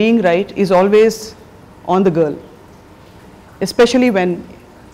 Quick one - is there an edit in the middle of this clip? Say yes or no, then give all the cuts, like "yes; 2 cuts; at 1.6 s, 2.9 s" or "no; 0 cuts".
no; 0 cuts